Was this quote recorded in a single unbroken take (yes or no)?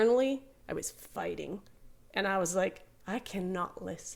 yes